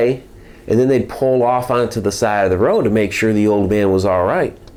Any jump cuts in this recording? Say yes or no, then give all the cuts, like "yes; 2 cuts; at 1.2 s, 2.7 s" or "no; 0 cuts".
no; 0 cuts